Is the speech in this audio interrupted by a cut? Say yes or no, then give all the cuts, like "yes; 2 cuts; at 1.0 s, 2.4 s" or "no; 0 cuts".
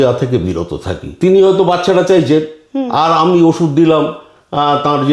yes; 1 cut; at 1.2 s